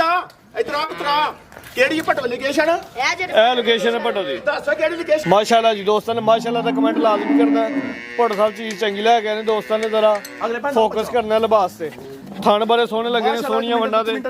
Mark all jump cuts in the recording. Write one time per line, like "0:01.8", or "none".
0:05.2